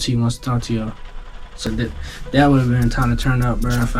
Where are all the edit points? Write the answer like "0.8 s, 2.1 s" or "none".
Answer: 1.7 s